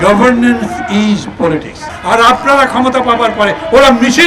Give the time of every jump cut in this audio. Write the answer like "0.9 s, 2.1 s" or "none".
1.9 s